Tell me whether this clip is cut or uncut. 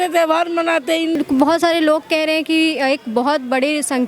cut